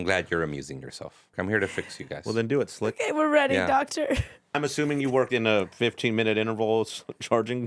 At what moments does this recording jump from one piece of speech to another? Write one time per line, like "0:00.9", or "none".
0:01.3
0:04.5